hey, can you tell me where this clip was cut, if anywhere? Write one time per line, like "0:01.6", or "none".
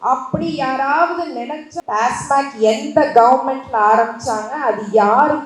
0:01.7